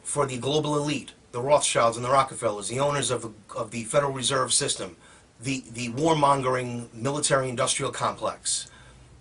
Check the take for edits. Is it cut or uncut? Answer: uncut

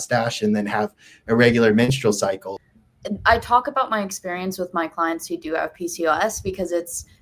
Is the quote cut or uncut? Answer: cut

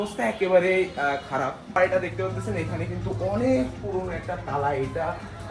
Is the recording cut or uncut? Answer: cut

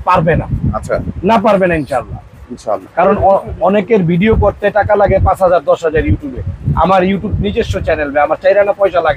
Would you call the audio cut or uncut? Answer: uncut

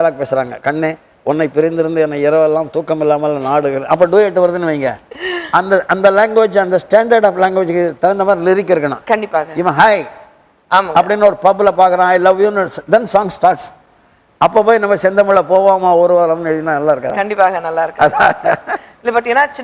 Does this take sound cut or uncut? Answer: uncut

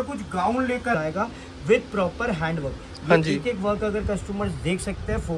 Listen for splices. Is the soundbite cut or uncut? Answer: cut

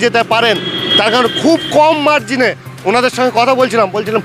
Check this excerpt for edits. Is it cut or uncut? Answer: uncut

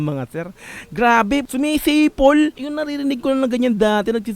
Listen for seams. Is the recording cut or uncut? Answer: cut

